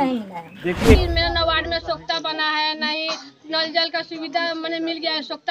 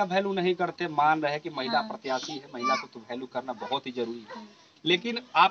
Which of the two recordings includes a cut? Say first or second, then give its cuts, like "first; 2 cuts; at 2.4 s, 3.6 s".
first; 1 cut; at 1.0 s